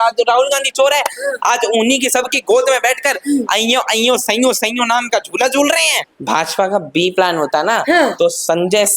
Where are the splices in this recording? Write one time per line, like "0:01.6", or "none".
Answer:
0:05.9